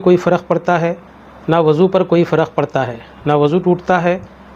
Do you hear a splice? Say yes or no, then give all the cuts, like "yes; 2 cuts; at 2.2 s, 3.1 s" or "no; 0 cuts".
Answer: no; 0 cuts